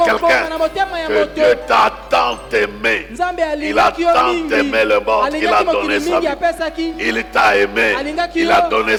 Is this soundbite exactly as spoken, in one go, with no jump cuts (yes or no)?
yes